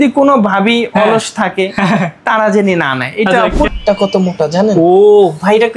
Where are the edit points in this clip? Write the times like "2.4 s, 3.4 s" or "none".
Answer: 3.7 s